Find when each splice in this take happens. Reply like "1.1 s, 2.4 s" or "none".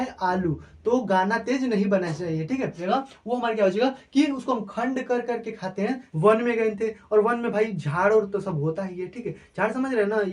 2.8 s, 6.1 s